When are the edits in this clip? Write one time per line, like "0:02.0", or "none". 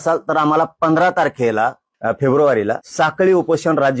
0:01.9
0:02.9